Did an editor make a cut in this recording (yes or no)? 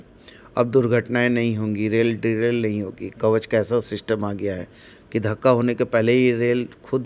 no